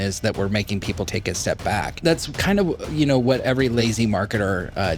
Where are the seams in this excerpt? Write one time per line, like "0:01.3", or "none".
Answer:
0:01.1
0:02.0
0:03.6